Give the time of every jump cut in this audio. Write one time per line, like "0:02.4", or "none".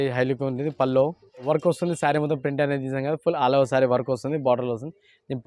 0:01.4